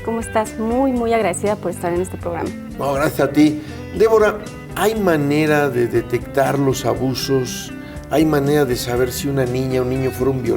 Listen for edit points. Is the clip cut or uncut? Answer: cut